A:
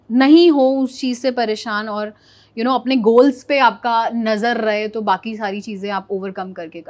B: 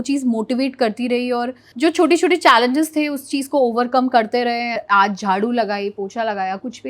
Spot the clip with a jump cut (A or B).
B